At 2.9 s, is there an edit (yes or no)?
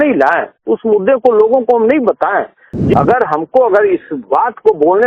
yes